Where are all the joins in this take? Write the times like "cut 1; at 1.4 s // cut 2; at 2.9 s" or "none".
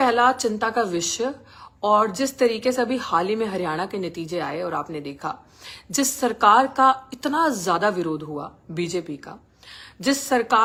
none